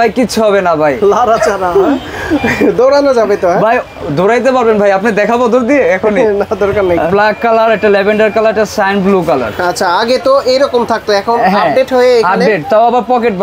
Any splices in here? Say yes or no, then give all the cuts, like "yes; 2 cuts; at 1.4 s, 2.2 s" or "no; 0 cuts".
yes; 1 cut; at 7.1 s